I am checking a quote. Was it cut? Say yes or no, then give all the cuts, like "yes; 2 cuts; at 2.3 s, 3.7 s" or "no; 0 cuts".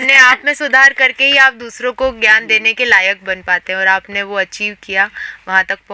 no; 0 cuts